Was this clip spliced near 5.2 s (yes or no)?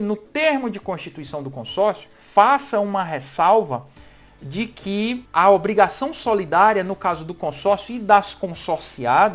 yes